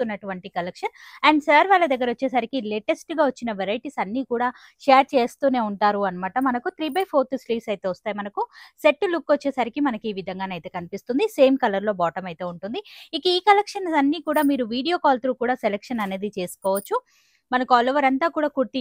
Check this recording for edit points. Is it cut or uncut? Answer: uncut